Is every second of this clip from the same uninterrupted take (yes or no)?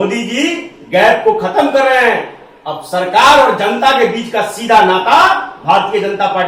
yes